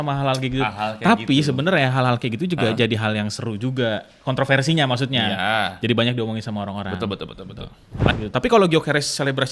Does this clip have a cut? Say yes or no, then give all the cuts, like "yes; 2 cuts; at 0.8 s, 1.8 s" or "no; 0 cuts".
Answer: yes; 1 cut; at 7.9 s